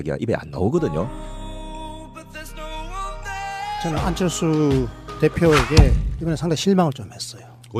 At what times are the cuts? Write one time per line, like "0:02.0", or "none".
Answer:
0:01.0